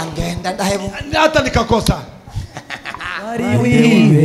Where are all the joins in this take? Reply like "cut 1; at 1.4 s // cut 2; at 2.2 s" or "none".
cut 1; at 3.4 s